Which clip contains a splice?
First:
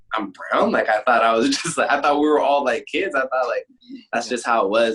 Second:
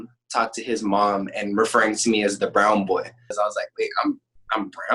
second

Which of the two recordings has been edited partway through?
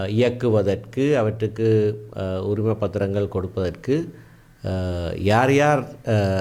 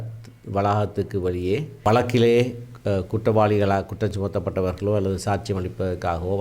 second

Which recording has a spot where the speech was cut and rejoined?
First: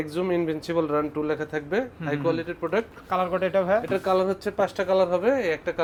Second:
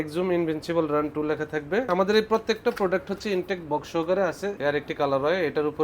second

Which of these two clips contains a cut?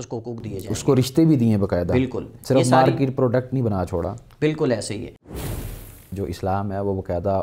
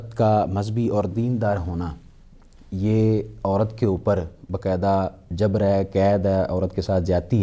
first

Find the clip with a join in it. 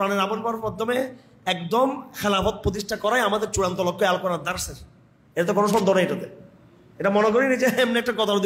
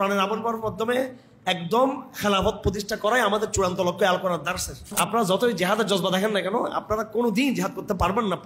second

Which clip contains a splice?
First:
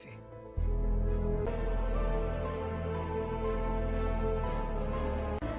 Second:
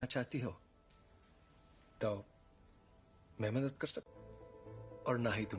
first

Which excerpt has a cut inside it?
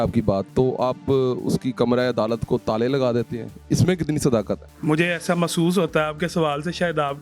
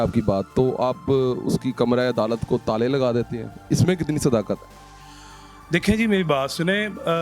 first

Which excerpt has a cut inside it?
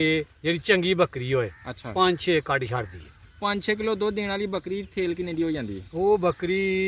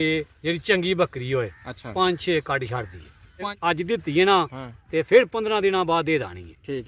second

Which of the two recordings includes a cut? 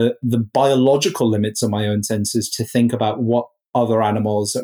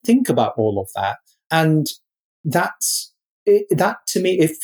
second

